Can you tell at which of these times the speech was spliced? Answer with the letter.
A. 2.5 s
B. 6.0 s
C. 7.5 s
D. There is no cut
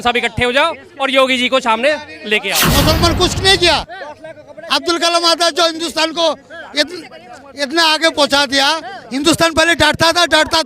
A